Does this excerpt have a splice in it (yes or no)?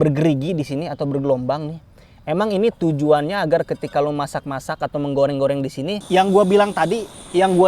yes